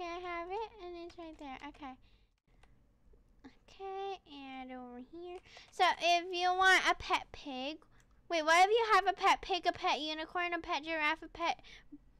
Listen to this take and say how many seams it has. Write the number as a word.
one